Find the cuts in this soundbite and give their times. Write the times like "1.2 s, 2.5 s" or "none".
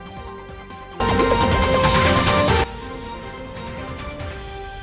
none